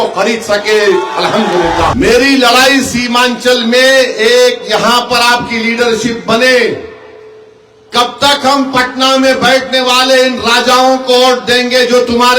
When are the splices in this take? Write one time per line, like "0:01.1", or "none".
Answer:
0:01.9